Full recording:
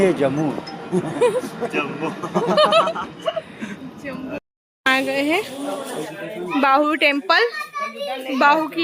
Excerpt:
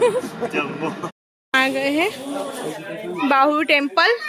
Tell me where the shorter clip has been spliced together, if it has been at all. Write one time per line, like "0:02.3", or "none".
0:01.1